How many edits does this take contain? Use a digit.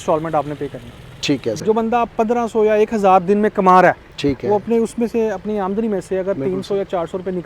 1